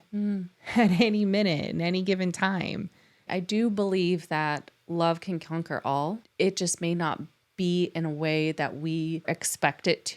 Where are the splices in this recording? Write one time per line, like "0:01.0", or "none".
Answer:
0:03.3
0:06.2
0:09.3